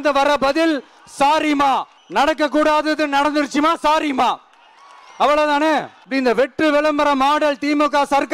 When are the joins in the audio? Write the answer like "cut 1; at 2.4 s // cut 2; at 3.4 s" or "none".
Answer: cut 1; at 2.0 s // cut 2; at 6.0 s